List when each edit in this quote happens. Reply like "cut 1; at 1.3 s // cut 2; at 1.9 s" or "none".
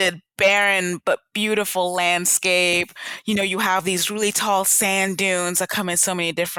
none